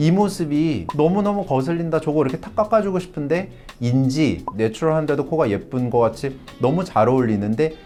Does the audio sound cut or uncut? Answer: uncut